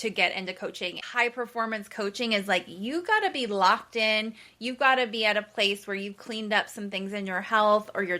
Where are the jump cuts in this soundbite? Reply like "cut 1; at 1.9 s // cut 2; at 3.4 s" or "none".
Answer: cut 1; at 1.0 s